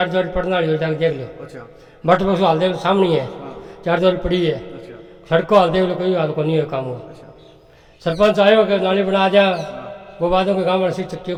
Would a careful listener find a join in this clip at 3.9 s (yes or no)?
no